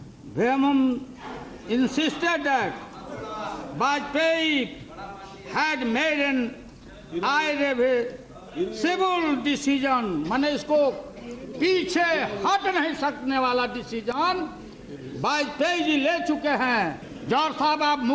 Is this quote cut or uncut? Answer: cut